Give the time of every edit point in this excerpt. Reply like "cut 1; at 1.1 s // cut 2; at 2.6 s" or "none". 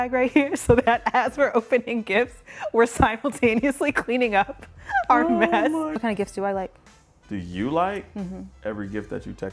cut 1; at 5.9 s